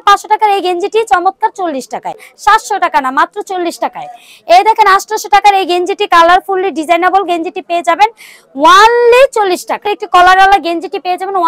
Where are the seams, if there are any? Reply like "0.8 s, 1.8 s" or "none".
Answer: 2.3 s, 10.0 s